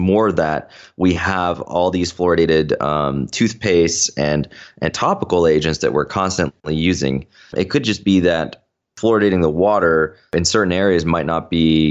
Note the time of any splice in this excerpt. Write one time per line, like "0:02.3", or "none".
0:07.5
0:08.9
0:10.3